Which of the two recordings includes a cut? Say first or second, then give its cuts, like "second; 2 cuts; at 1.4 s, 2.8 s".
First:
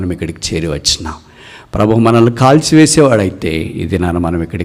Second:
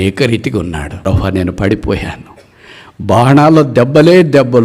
second; 1 cut; at 1.0 s